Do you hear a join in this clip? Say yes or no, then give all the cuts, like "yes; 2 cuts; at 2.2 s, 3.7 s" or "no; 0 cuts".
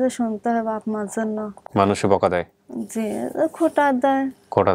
no; 0 cuts